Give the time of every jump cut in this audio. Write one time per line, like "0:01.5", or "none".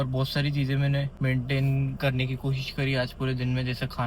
0:01.1